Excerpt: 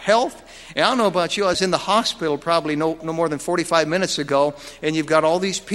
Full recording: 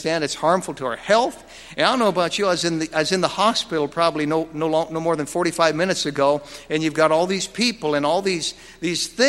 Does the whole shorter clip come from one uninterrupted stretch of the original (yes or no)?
no